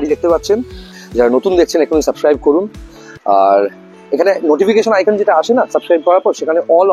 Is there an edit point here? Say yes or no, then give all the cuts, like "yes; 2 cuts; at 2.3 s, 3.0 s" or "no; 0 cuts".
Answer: yes; 1 cut; at 1.0 s